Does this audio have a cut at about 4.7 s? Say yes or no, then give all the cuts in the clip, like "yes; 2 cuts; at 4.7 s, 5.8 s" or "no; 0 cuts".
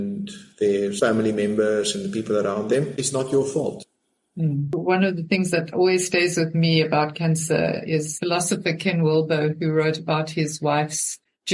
yes; 1 cut; at 4.7 s